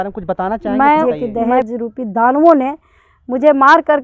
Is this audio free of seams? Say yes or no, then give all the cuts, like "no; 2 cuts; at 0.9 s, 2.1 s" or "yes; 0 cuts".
no; 1 cut; at 1.0 s